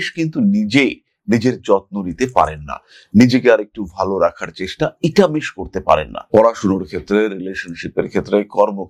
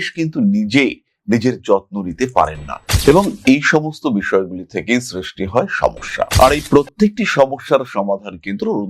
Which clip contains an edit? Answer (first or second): second